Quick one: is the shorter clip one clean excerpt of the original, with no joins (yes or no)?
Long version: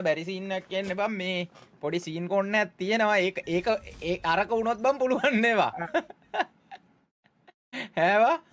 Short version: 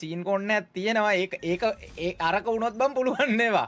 yes